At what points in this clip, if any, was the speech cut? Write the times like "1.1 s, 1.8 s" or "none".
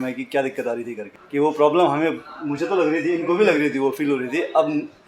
1.1 s